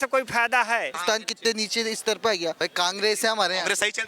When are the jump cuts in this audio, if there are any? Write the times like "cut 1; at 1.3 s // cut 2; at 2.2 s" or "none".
cut 1; at 0.9 s // cut 2; at 2.6 s